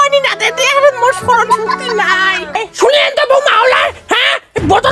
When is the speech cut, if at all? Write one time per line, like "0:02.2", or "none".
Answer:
0:02.6